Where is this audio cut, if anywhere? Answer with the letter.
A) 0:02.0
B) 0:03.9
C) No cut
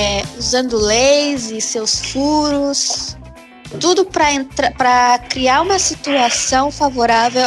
C